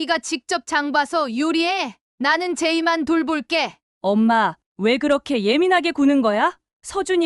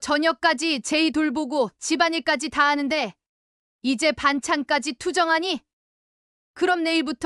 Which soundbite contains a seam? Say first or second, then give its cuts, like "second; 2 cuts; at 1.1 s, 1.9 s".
first; 1 cut; at 3.8 s